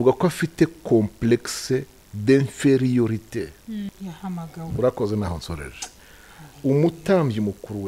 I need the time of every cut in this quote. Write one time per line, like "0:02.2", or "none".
0:03.9

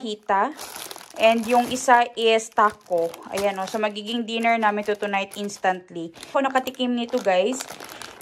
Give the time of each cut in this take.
0:06.3

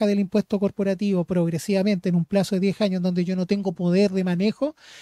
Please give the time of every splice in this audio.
none

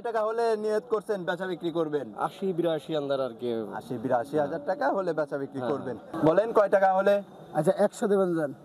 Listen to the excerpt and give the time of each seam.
0:06.0

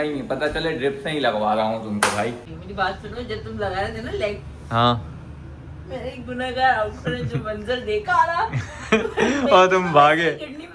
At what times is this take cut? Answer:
0:02.5

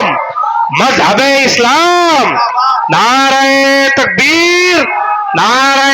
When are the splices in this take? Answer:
none

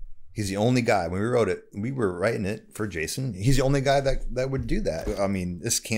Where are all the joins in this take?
0:05.1

